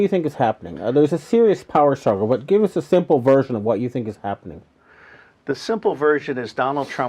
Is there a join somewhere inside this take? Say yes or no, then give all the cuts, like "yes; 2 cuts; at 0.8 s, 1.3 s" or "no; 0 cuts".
yes; 1 cut; at 3.6 s